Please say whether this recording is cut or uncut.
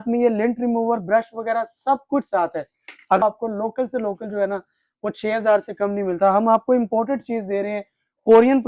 cut